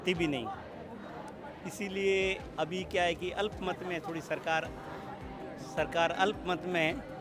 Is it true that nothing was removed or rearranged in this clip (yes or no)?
yes